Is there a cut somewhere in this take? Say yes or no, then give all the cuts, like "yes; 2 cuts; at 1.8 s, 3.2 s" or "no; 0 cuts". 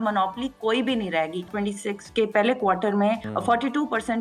yes; 2 cuts; at 1.5 s, 3.3 s